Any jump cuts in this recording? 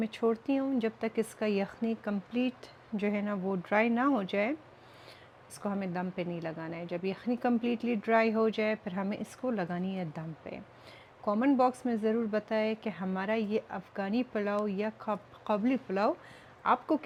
no; 0 cuts

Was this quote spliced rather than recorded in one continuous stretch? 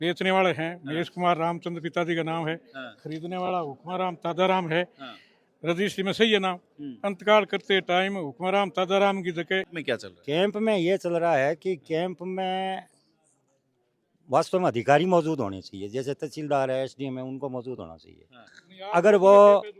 yes; 1 cut; at 9.7 s

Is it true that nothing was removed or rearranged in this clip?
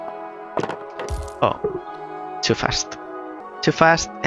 yes; 0 cuts

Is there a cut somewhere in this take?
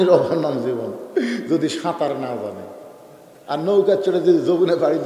no; 0 cuts

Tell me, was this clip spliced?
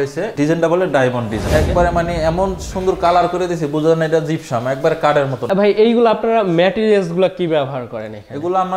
yes; 2 cuts; at 1.4 s, 5.5 s

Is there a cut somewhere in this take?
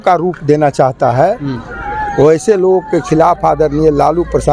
no; 0 cuts

